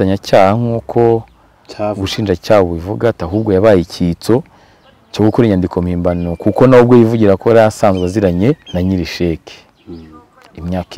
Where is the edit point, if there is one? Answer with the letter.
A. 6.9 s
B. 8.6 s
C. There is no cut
B